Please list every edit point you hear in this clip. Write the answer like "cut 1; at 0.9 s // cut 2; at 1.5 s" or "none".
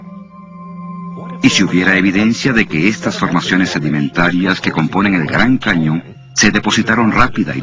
cut 1; at 2.4 s